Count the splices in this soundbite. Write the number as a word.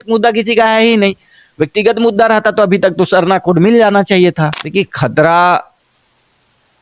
one